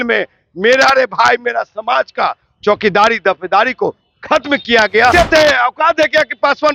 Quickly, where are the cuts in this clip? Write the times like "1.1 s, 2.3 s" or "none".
5.1 s